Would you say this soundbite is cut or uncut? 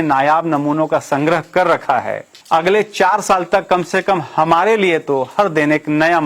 uncut